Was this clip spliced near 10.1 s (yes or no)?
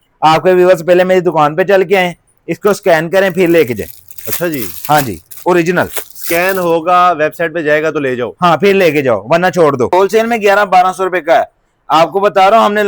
yes